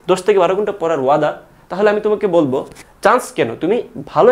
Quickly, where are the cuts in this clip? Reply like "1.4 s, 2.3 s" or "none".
2.8 s